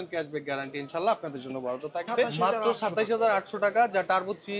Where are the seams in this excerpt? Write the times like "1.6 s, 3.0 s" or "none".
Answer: 2.3 s